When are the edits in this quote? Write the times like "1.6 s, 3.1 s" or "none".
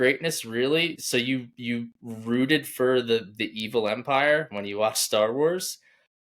1.0 s